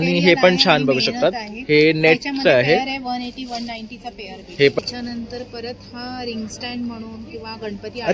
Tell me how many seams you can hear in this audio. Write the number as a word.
one